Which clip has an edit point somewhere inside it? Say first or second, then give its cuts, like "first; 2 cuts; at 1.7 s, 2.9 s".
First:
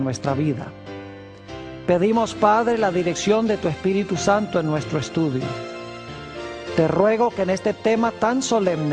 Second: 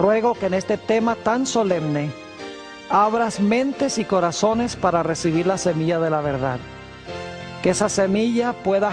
first; 1 cut; at 3.1 s